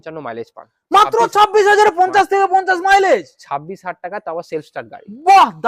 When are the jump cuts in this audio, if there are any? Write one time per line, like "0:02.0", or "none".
none